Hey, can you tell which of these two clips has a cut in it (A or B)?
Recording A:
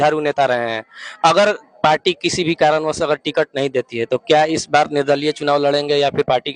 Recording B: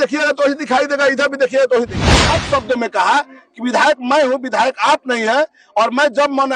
B